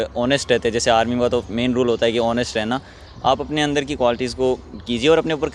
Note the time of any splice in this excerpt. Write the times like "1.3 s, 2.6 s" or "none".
none